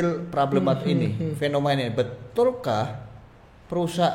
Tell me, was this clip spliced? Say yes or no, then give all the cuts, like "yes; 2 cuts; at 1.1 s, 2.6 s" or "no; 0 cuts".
no; 0 cuts